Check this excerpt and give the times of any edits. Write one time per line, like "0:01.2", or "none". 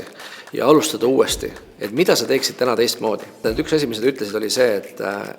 0:03.4